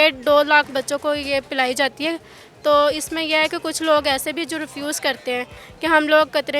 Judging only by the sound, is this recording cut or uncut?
uncut